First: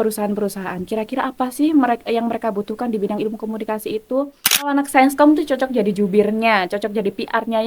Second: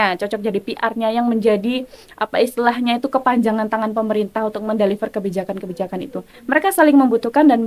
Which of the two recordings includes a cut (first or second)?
first